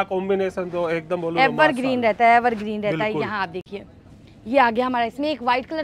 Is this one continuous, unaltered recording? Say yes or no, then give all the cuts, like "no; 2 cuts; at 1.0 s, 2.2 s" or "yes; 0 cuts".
yes; 0 cuts